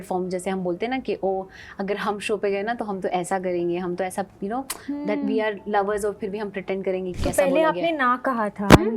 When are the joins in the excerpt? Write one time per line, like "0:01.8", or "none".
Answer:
0:07.1